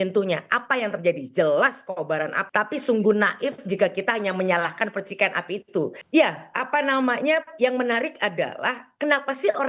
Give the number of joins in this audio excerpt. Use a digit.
2